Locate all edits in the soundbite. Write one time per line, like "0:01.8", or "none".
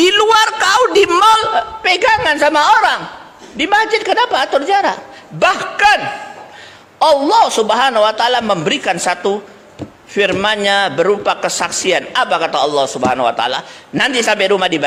none